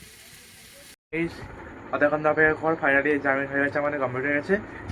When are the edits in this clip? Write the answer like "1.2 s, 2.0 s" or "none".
0.9 s